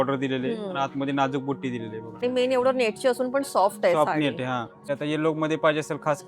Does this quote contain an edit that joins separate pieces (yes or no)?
yes